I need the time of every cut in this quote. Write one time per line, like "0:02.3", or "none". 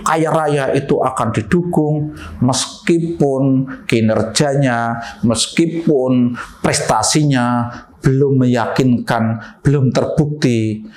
none